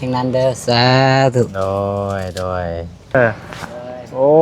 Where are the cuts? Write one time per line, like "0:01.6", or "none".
0:03.1